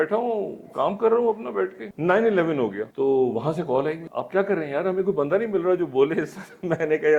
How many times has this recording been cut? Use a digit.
3